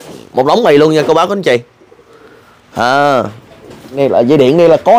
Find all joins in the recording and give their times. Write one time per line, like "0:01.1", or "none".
0:04.0